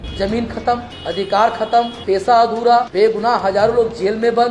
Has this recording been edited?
yes; 3 cuts; at 0.9 s, 2.0 s, 2.9 s

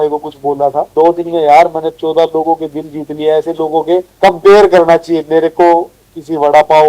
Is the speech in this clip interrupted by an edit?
yes; 2 cuts; at 0.9 s, 4.1 s

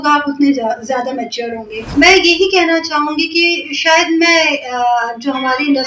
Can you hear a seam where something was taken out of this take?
yes; 1 cut; at 1.8 s

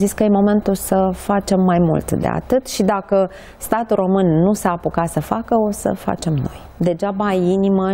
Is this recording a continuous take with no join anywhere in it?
no; 1 cut; at 6.6 s

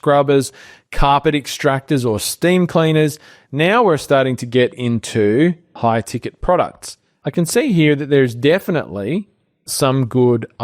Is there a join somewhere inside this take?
yes; 3 cuts; at 5.7 s, 7.1 s, 9.7 s

